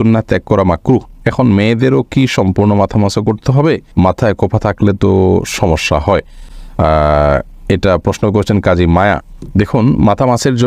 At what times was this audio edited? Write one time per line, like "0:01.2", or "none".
none